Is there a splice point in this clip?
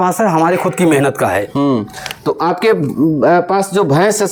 no; 0 cuts

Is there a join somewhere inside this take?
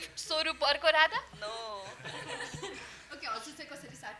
no; 0 cuts

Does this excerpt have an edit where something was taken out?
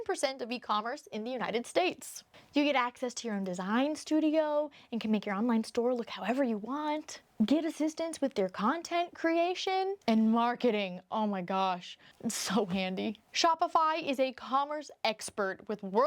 yes; 2 cuts; at 7.2 s, 12.0 s

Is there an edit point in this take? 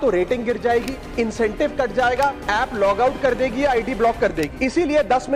yes; 3 cuts; at 1.0 s, 2.4 s, 4.5 s

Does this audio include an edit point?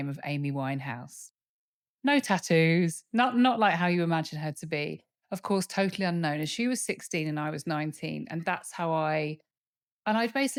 no; 0 cuts

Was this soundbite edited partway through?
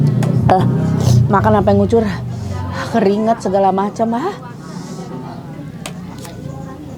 no; 0 cuts

